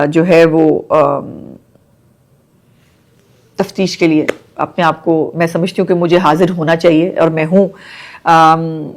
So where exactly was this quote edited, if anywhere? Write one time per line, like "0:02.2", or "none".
none